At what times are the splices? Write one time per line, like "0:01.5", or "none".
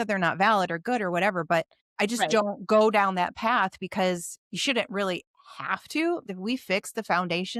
0:01.8
0:06.3